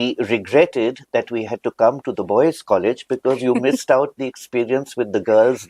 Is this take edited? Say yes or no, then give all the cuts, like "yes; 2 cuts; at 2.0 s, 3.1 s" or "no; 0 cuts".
no; 0 cuts